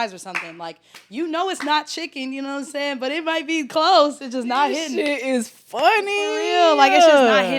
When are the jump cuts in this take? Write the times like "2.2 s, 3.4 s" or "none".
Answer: none